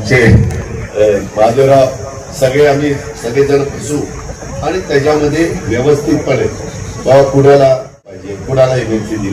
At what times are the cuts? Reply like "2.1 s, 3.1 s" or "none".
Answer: 8.2 s